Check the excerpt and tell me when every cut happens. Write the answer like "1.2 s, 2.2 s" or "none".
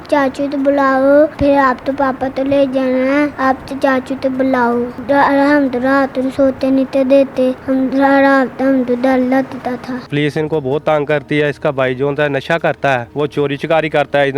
1.3 s, 3.3 s, 4.9 s, 7.6 s, 10.1 s, 13.1 s